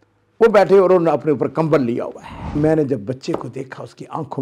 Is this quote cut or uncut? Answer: cut